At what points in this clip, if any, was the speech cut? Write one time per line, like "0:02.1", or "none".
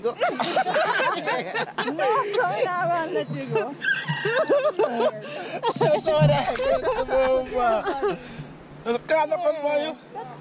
none

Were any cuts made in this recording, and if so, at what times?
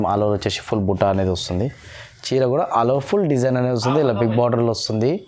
none

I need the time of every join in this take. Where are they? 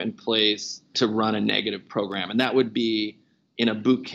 0:00.9

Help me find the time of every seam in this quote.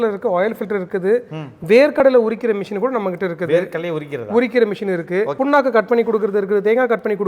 none

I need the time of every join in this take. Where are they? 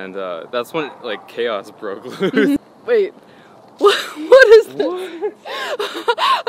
0:02.7

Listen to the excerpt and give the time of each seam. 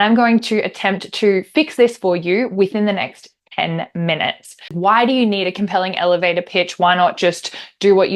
0:04.7

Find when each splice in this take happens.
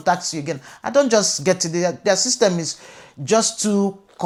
none

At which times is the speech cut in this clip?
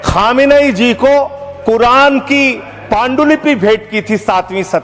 none

